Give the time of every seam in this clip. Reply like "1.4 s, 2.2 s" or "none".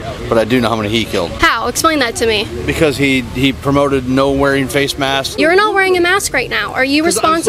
1.3 s, 5.3 s